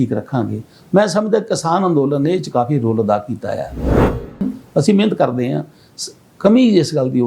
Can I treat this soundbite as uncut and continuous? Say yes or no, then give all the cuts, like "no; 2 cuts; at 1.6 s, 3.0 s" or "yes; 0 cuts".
no; 1 cut; at 4.0 s